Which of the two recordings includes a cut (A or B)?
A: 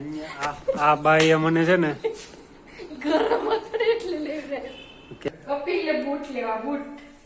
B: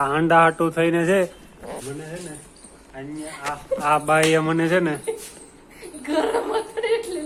A